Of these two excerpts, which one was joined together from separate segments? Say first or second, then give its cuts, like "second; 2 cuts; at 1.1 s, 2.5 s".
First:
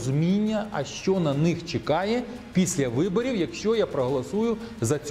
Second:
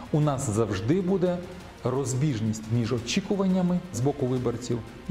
second; 1 cut; at 3.9 s